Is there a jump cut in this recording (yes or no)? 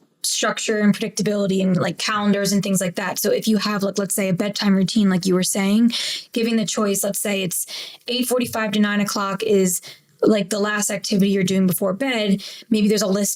no